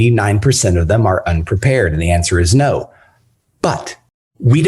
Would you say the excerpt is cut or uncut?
uncut